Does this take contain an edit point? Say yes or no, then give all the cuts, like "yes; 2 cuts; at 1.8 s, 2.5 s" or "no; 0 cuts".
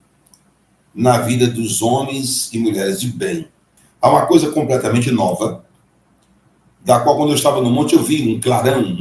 yes; 1 cut; at 3.8 s